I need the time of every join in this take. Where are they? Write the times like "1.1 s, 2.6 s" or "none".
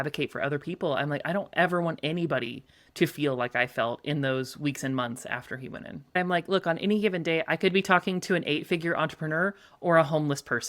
6.2 s